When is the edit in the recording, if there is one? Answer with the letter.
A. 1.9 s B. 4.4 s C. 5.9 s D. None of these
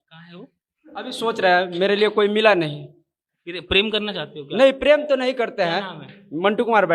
D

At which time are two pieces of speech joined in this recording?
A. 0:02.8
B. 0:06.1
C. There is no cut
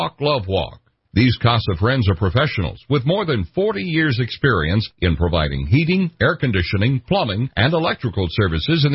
C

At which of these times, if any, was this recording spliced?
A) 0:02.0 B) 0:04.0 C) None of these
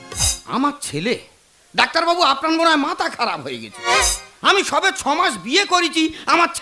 C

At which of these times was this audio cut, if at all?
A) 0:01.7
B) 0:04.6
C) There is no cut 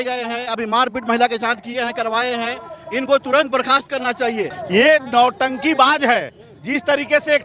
B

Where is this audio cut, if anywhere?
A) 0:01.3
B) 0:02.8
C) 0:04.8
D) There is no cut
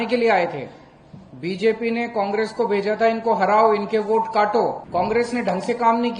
C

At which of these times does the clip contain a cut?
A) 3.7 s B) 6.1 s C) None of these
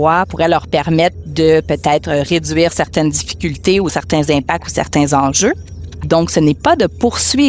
B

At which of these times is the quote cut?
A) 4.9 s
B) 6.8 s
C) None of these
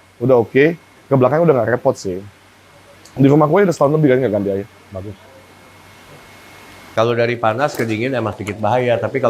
B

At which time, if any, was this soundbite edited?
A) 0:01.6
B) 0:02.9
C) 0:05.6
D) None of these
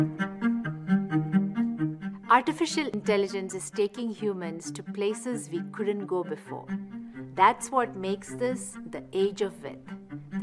B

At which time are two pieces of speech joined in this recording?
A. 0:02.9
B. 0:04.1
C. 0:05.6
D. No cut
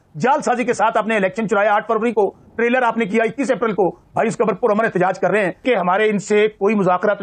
C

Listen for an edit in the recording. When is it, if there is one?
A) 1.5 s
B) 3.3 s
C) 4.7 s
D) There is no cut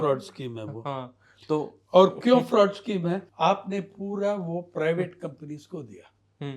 B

